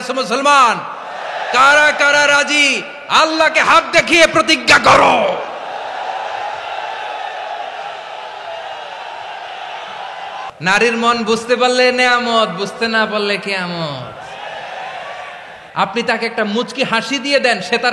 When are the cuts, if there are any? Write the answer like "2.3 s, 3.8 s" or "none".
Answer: 10.5 s, 15.6 s